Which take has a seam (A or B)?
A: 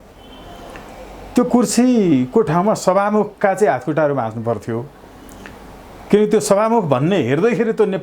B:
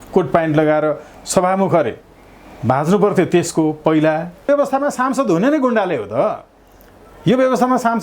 B